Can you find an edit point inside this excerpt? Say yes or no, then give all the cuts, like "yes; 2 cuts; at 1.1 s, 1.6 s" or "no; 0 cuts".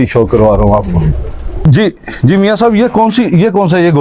yes; 1 cut; at 1.5 s